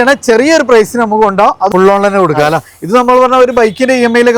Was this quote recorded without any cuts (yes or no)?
no